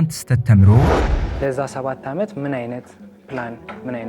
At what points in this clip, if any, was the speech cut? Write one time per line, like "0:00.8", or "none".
0:01.0